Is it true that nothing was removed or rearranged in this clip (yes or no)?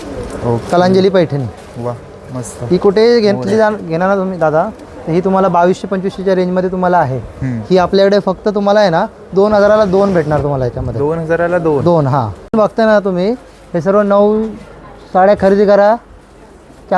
no